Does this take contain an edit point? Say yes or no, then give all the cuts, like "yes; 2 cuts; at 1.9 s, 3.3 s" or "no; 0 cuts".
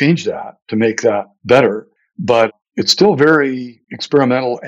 no; 0 cuts